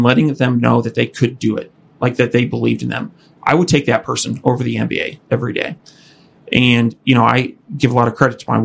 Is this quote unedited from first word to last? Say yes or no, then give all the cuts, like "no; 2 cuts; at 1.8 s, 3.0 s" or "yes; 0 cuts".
yes; 0 cuts